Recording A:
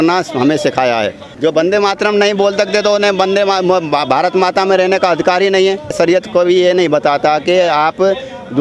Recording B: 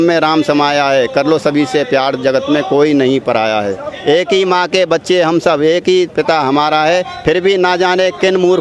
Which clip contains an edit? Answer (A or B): A